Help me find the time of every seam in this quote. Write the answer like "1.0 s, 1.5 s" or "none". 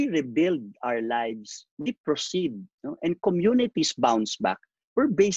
none